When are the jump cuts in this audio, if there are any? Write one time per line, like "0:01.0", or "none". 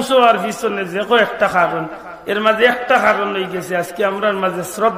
none